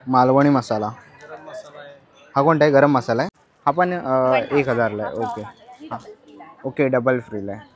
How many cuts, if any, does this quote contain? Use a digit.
1